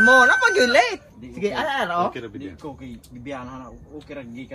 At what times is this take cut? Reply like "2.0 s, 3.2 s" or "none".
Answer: 1.0 s